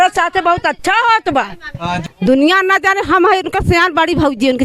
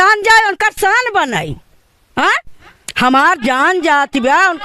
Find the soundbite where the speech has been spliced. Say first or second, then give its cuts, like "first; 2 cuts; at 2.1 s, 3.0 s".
first; 1 cut; at 2.0 s